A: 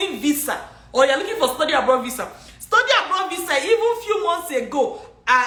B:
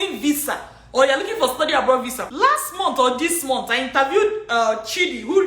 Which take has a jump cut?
B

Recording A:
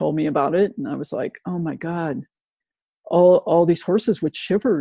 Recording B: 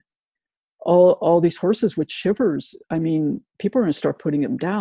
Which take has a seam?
B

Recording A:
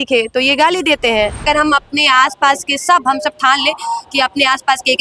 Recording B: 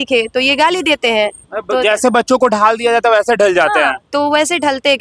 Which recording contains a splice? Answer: A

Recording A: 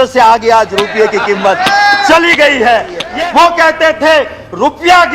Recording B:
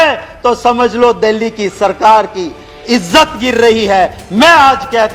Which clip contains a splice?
A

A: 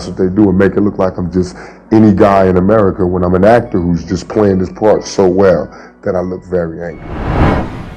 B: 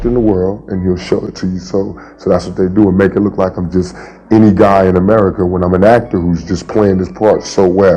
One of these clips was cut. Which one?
A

